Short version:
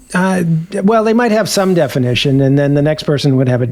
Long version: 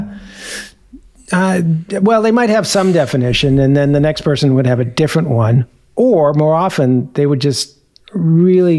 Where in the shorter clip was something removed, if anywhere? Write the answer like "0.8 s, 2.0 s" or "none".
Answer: none